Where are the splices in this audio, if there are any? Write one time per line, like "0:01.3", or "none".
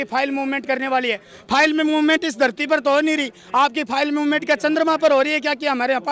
none